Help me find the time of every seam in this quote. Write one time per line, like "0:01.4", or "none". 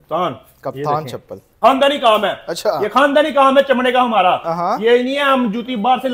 0:01.5